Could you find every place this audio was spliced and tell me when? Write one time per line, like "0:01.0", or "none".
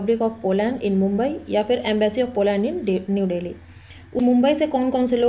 0:04.2